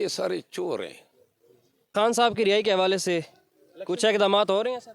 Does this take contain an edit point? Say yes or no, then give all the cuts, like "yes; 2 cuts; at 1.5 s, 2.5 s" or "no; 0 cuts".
yes; 1 cut; at 1.9 s